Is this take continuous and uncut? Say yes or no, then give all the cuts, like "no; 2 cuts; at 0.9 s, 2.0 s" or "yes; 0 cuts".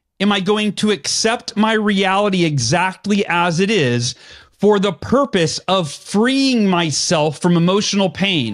yes; 0 cuts